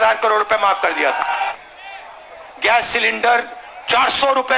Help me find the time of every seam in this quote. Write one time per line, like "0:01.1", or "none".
0:01.5